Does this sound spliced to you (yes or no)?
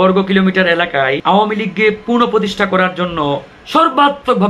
yes